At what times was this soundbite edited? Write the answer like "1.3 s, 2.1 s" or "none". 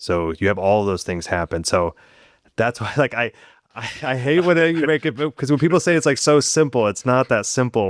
none